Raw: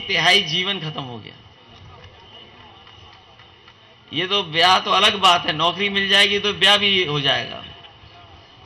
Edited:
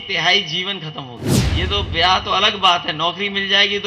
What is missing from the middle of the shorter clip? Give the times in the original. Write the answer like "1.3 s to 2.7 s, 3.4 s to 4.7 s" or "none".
1.4 s to 4.0 s